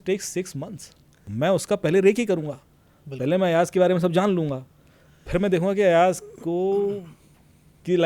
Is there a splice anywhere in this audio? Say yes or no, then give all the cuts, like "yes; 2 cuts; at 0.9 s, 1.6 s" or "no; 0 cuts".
yes; 1 cut; at 1.2 s